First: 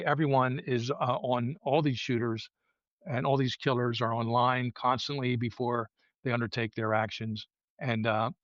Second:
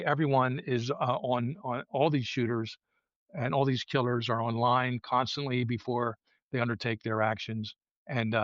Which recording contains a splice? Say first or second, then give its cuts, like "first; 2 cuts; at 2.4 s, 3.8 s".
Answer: first; 1 cut; at 1.5 s